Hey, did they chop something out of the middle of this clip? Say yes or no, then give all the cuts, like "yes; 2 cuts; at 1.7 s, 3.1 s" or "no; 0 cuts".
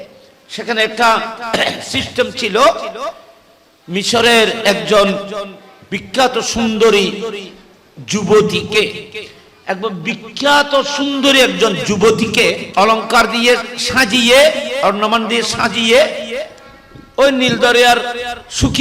yes; 1 cut; at 12.6 s